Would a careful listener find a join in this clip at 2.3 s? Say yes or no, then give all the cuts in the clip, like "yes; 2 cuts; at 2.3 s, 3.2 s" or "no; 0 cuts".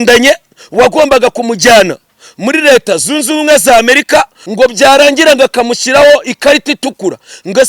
no; 1 cut; at 4.4 s